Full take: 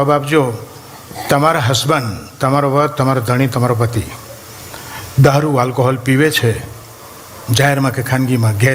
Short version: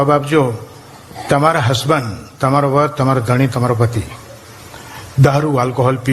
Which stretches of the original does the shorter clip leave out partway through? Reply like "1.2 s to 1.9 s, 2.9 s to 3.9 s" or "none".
none

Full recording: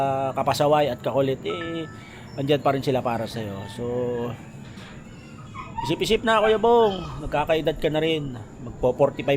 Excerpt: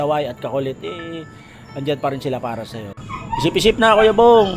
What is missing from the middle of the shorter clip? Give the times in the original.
3.6 s to 5.4 s

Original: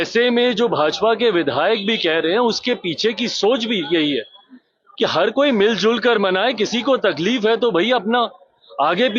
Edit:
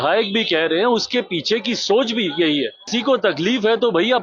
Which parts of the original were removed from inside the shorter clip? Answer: 4.4 s to 6.7 s

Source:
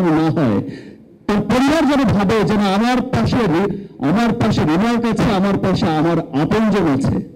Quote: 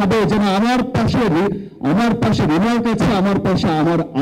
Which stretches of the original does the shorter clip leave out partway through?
none

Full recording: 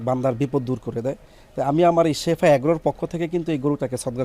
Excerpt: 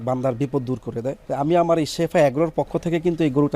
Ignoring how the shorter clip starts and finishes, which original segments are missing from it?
1.2 s to 1.5 s

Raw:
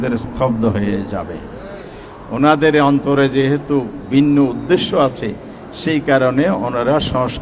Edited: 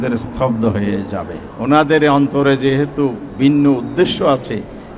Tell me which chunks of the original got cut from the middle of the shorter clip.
1.4 s to 2.1 s

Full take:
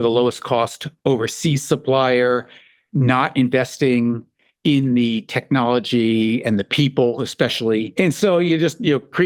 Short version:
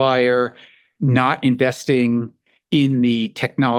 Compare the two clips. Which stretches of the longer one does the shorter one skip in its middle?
none

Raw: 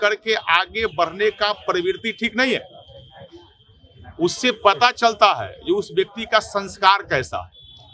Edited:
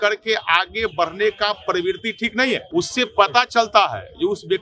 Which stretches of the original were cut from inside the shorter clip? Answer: 2.7 s to 4.1 s

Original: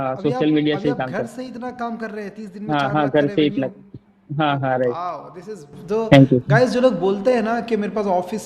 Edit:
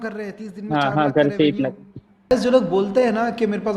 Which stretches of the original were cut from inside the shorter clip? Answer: 4.3 s to 6.6 s

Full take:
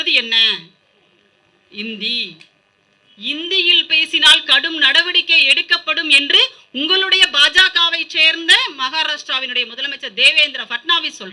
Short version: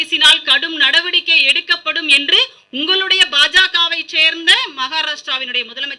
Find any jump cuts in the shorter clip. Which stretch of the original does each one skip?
none

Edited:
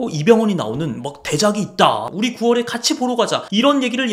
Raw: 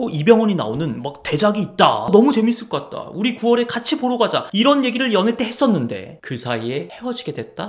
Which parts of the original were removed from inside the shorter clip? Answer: 2.0 s to 3.0 s

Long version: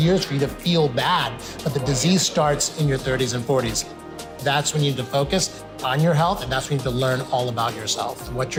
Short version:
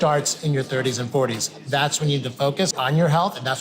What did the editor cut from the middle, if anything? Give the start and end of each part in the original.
3.8 s to 4.2 s, 5.5 s to 5.8 s

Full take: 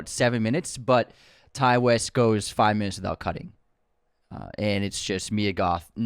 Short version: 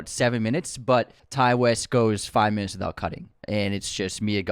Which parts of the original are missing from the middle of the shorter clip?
1.2 s to 1.4 s, 3.5 s to 4.4 s

